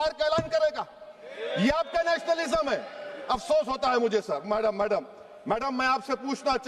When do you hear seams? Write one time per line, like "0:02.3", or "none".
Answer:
none